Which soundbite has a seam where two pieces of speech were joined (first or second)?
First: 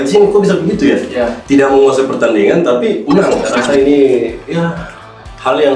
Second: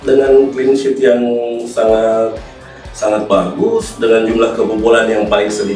first